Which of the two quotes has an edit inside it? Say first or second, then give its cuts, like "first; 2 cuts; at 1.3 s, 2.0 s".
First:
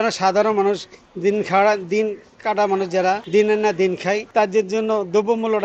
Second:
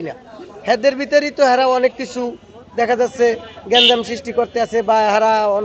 first; 2 cuts; at 3.2 s, 4.2 s